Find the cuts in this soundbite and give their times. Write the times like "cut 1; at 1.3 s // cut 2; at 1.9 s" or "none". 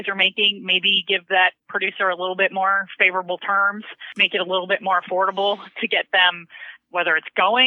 cut 1; at 4.2 s